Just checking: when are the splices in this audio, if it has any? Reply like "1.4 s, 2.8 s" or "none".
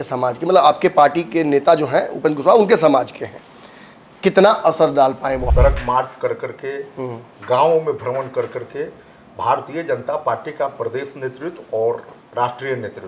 5.5 s